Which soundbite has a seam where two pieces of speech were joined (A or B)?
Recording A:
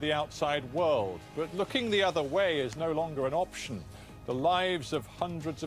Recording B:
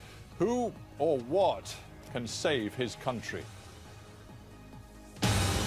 A